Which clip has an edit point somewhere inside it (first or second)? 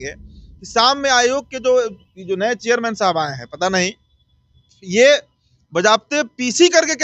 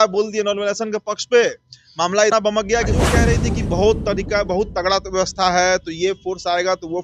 second